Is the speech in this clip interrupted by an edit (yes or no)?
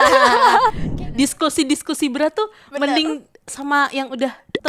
yes